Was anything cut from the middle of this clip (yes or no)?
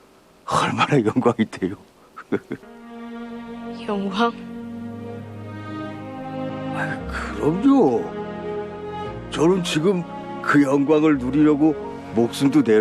yes